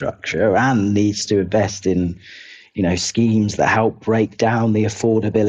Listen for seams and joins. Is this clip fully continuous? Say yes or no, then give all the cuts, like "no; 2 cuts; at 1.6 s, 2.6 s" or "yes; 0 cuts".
yes; 0 cuts